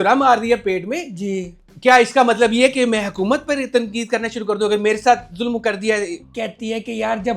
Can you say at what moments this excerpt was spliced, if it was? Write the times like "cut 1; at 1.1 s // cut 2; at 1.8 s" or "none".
cut 1; at 6.2 s